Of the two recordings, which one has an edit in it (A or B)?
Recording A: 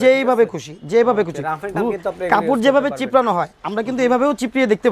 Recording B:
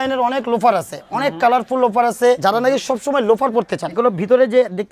B